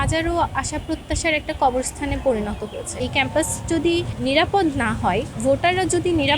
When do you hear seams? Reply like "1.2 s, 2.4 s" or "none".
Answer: 2.8 s, 4.1 s, 5.3 s